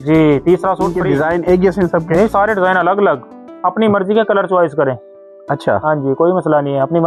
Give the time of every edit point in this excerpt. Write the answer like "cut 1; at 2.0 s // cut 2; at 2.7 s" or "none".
cut 1; at 1.0 s